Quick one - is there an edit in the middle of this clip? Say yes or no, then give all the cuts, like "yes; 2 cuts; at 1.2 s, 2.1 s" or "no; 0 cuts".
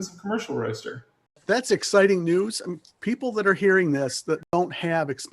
yes; 2 cuts; at 1.4 s, 4.4 s